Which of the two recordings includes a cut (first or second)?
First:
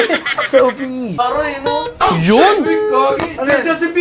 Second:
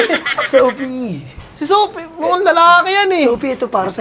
first